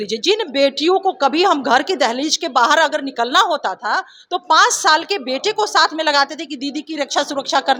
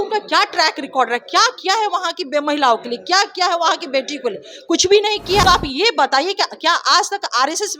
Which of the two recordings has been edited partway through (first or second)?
second